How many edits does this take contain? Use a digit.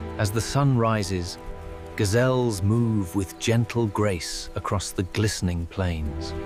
0